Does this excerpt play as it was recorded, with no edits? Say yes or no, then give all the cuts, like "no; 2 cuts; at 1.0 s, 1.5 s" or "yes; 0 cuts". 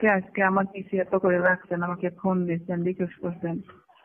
yes; 0 cuts